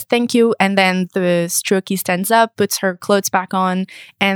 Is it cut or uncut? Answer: cut